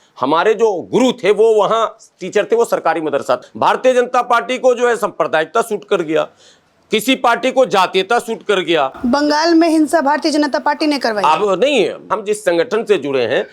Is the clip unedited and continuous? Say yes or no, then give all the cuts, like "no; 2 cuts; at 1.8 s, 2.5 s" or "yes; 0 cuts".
no; 3 cuts; at 3.4 s, 9.0 s, 12.1 s